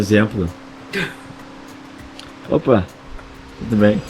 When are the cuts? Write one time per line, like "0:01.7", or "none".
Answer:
none